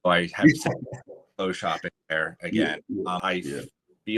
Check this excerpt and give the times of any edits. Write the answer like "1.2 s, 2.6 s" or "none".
3.2 s